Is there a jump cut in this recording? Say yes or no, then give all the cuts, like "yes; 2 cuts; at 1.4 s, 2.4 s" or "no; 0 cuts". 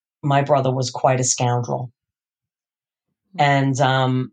no; 0 cuts